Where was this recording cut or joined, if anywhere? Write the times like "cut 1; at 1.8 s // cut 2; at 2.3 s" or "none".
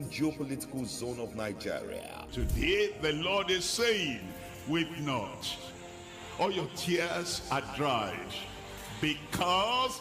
cut 1; at 2.0 s

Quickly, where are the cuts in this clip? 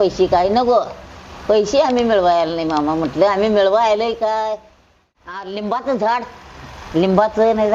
cut 1; at 5.5 s

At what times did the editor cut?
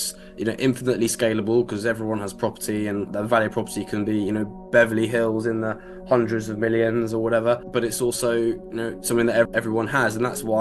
cut 1; at 9.5 s

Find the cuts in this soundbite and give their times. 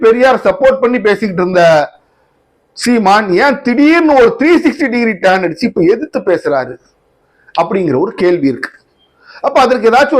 none

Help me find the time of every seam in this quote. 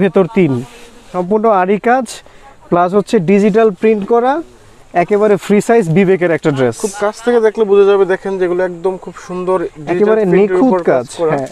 cut 1; at 1.2 s

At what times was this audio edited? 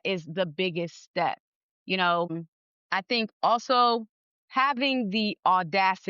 cut 1; at 2.4 s

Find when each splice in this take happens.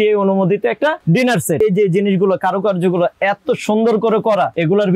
cut 1; at 1.6 s

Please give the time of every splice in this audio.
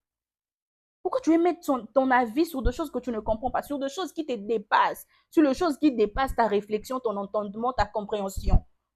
none

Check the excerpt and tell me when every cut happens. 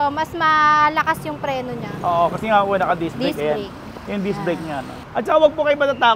cut 1; at 5.0 s

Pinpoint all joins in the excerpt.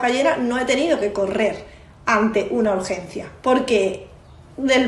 none

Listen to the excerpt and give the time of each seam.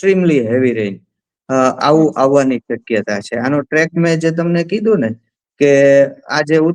none

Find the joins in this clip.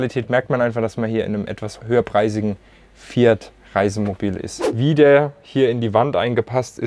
cut 1; at 1.8 s // cut 2; at 4.6 s

